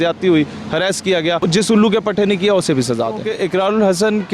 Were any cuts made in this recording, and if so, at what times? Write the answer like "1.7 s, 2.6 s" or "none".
1.4 s, 3.3 s